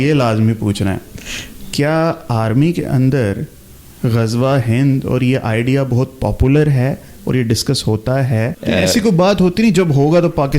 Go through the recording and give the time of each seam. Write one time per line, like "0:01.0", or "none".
0:08.5

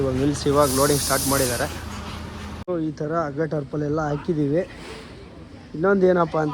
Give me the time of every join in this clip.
0:02.7

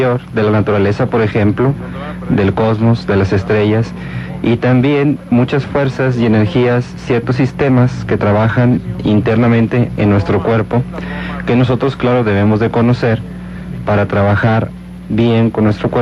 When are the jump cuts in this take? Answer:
0:02.8

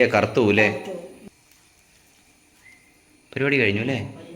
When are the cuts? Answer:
0:01.2

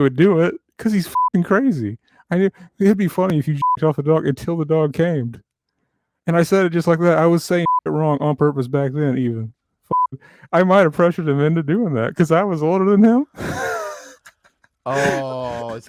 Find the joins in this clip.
none

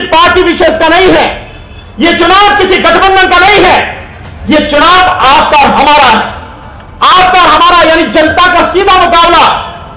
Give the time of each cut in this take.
none

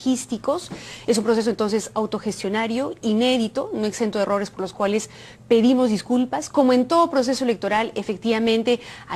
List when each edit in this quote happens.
0:03.5

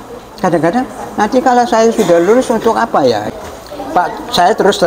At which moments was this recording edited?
0:03.3

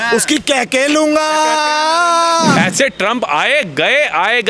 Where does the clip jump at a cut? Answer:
0:02.5

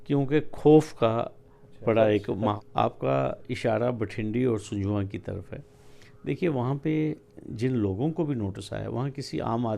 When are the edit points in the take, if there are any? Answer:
0:02.6

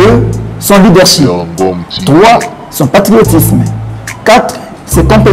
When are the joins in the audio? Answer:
none

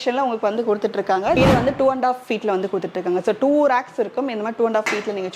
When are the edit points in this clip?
0:01.4

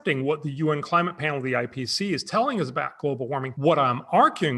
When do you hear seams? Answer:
0:03.5

